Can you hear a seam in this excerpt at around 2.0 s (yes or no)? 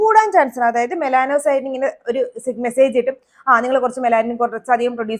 no